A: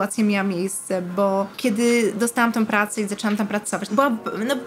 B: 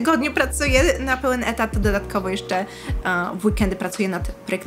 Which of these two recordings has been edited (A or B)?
A